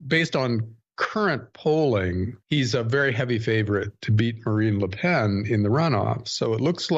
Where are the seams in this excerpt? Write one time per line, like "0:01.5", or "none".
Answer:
0:02.1